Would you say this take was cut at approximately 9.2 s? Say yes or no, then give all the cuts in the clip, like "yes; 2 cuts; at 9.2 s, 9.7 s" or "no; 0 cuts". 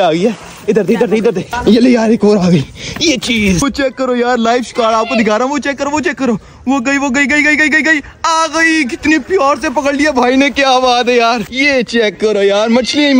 no; 3 cuts; at 1.5 s, 3.6 s, 11.5 s